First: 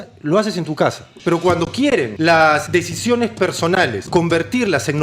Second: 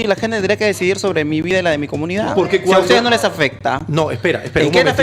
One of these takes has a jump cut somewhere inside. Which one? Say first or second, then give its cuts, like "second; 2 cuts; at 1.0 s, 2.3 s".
first; 3 cuts; at 1.1 s, 2.1 s, 4.0 s